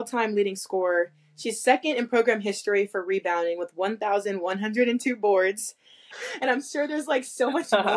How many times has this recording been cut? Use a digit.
1